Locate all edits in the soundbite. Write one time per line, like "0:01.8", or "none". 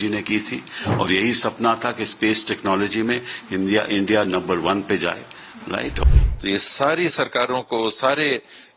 0:06.0

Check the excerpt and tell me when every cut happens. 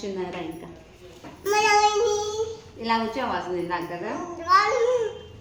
none

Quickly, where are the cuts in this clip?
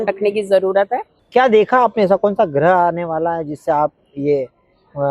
0:01.1

